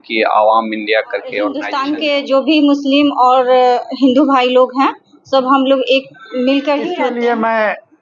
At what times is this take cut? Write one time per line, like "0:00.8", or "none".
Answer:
0:01.7
0:06.9